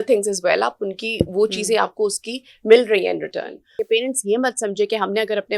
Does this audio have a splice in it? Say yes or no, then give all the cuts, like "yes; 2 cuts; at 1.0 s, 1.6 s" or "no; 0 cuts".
yes; 1 cut; at 3.6 s